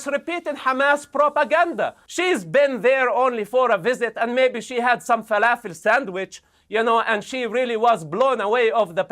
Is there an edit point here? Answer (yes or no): yes